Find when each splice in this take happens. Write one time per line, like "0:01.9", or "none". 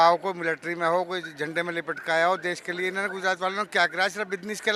none